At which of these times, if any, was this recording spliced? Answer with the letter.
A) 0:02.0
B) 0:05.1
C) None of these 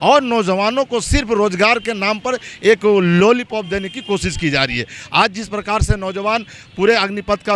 C